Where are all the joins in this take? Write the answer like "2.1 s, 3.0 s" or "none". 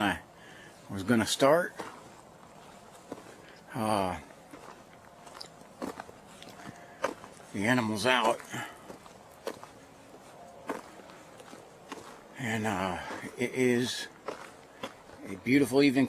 13.3 s

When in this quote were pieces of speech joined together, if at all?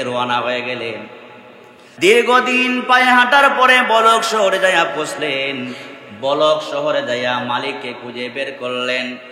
1.8 s

